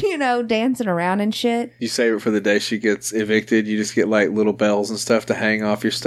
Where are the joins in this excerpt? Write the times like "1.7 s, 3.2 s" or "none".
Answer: 1.8 s

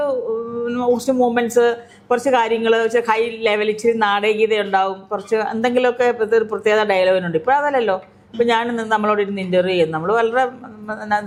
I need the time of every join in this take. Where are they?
none

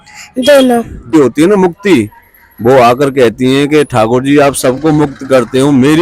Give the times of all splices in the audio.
1.1 s

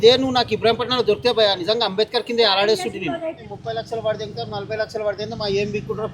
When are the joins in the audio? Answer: 3.4 s

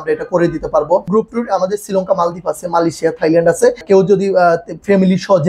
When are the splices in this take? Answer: 1.1 s, 3.8 s

